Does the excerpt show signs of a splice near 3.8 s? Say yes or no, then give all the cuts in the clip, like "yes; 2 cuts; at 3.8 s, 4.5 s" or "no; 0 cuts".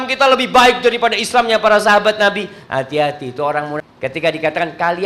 yes; 1 cut; at 3.8 s